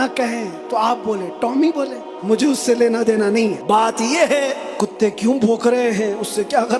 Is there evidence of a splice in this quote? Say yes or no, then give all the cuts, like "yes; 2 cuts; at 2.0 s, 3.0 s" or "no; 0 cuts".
yes; 3 cuts; at 2.1 s, 3.6 s, 4.6 s